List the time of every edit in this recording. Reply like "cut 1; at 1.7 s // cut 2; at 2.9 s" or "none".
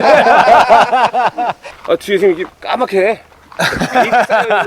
cut 1; at 1.7 s